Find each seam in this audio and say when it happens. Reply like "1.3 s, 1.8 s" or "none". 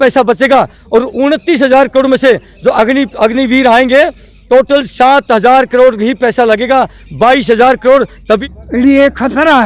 8.4 s

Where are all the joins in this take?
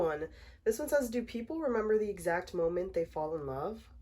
none

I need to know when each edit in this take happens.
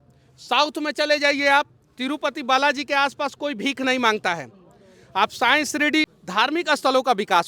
6.1 s

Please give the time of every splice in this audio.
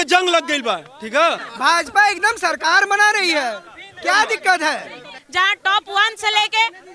1.4 s, 5.1 s

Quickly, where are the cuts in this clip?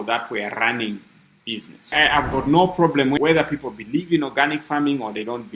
1.9 s, 3.2 s

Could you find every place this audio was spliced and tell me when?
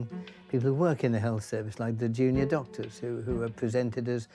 none

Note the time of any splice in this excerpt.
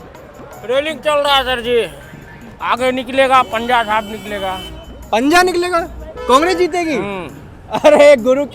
2.1 s

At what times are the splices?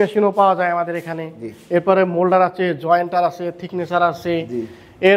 none

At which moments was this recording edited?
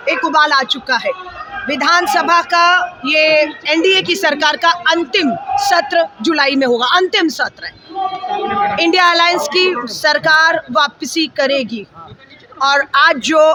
none

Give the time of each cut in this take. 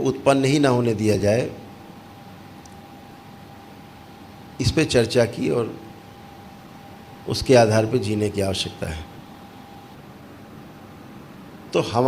9.9 s

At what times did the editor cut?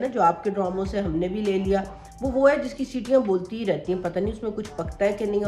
none

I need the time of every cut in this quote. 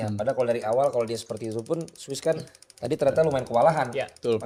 none

